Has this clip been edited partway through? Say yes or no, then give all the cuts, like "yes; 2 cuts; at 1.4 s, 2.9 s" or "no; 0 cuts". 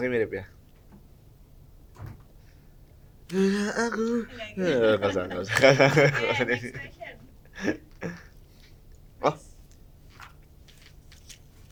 no; 0 cuts